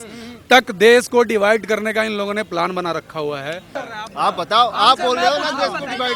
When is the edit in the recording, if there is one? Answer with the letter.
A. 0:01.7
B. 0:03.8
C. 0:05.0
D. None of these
B